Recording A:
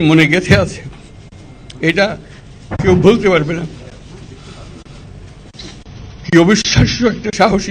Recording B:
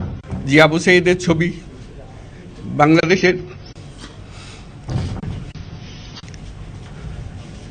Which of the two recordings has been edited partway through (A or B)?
B